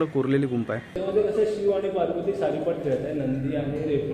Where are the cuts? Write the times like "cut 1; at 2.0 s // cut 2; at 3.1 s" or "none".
cut 1; at 0.9 s